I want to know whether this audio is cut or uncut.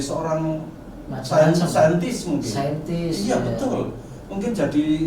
uncut